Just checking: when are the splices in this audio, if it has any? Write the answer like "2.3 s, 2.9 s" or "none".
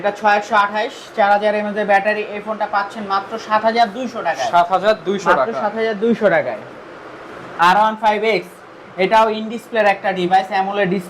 none

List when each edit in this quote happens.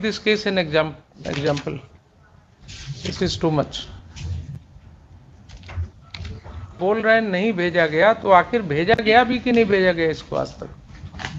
none

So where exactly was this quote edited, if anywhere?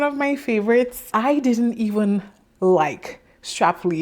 1.1 s

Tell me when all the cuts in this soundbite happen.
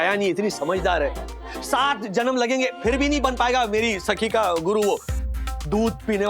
5.1 s

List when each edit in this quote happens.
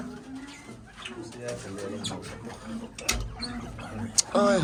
none

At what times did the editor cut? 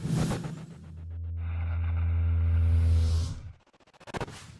none

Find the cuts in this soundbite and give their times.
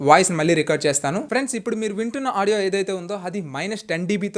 none

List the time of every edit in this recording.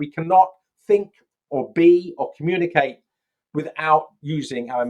none

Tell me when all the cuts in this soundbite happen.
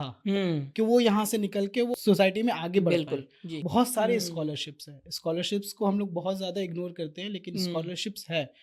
1.9 s, 3.5 s

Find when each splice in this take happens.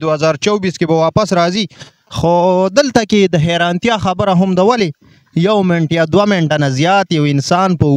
none

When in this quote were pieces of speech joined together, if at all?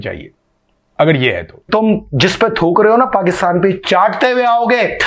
1.7 s

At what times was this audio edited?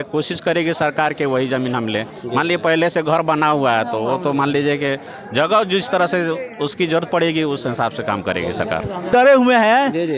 none

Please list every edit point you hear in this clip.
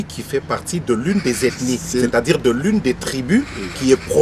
none

